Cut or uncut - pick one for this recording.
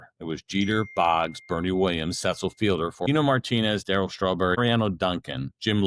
cut